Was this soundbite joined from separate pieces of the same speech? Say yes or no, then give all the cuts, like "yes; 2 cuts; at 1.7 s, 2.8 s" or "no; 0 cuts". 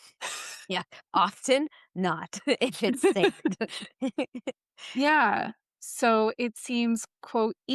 yes; 1 cut; at 5.6 s